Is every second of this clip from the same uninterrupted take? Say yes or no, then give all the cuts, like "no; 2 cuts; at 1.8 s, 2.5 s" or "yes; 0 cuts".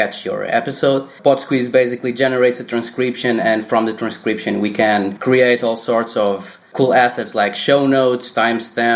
no; 3 cuts; at 1.2 s, 5.2 s, 6.6 s